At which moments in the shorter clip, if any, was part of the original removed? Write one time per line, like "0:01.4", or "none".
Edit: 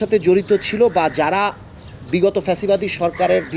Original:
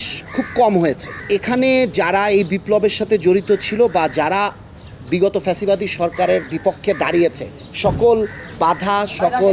none